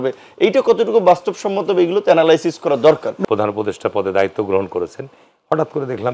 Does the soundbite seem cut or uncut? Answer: cut